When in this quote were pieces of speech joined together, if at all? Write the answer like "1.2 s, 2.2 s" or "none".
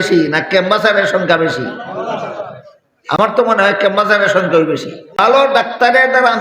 5.2 s